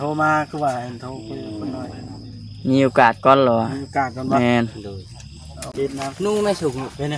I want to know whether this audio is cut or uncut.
cut